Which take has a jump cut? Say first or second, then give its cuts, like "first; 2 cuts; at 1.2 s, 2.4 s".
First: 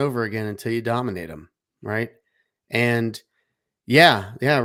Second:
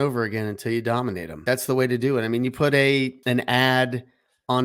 second; 2 cuts; at 1.4 s, 3.2 s